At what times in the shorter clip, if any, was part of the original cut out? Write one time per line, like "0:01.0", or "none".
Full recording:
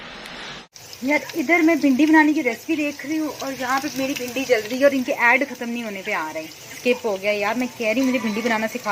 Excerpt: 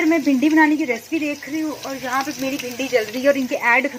none